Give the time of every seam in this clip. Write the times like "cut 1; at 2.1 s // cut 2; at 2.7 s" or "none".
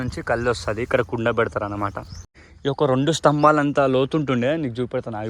cut 1; at 2.4 s